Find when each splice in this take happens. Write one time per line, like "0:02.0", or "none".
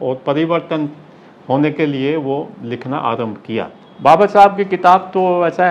0:03.8

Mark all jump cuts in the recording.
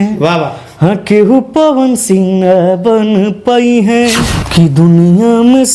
0:04.3

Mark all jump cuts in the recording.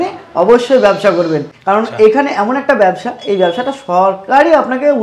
0:01.5

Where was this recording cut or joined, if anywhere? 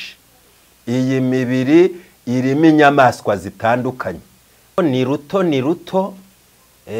0:04.8

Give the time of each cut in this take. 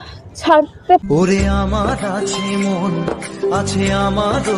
none

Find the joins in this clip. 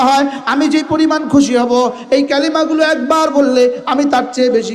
none

